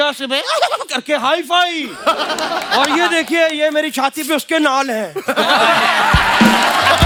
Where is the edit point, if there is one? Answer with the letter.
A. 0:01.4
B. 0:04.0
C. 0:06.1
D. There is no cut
D